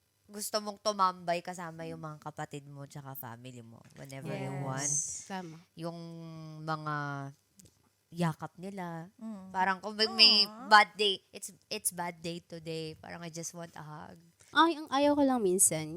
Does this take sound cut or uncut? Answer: cut